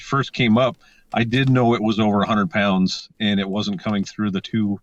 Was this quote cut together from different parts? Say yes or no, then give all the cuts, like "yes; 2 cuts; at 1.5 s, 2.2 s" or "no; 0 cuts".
no; 0 cuts